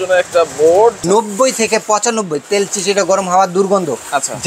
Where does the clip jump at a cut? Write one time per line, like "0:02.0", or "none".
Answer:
0:01.0